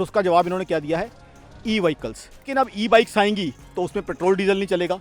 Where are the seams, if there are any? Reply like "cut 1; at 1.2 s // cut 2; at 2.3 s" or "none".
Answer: cut 1; at 2.5 s